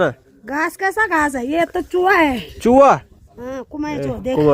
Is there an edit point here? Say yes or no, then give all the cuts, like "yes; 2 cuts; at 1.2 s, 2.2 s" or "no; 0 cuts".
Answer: no; 0 cuts